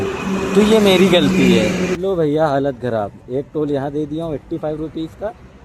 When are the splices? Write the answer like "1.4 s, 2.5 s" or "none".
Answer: 2.0 s